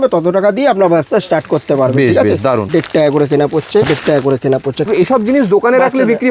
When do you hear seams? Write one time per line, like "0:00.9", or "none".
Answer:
0:02.6
0:03.9
0:04.9